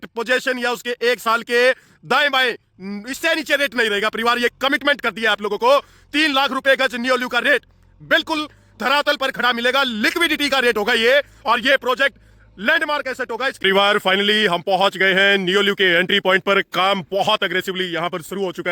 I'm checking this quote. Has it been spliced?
yes; 1 cut; at 13.5 s

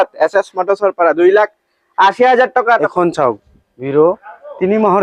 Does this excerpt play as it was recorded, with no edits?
no; 1 cut; at 2.8 s

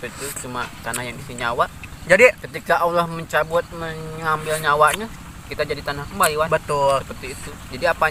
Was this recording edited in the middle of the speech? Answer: no; 0 cuts

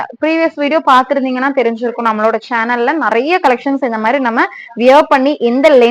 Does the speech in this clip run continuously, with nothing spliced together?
yes; 0 cuts

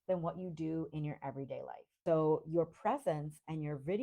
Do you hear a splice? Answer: yes; 1 cut; at 1.9 s

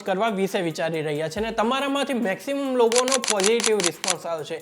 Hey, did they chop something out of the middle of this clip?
no; 0 cuts

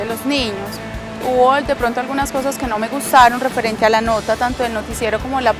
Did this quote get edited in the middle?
no; 0 cuts

